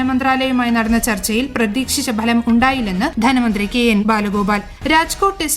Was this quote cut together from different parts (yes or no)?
yes